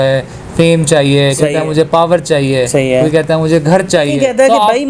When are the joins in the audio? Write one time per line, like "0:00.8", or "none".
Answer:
0:01.6
0:04.1